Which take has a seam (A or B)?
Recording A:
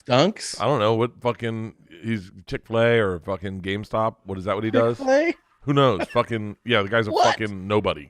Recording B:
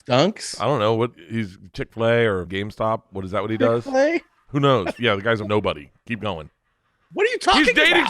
B